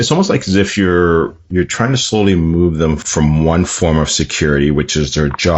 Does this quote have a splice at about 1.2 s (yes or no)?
no